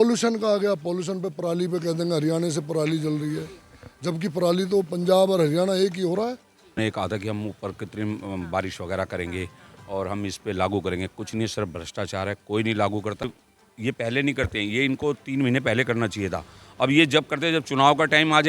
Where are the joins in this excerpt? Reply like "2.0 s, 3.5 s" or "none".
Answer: 6.8 s, 13.2 s